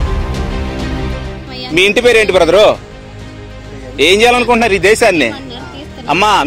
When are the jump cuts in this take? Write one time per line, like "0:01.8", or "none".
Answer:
0:01.4